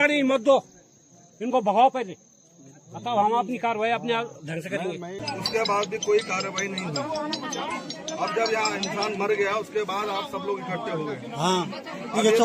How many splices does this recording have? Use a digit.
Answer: 1